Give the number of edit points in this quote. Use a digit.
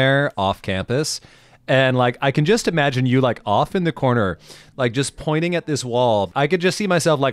1